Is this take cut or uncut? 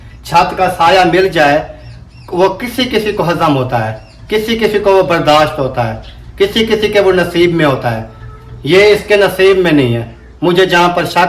uncut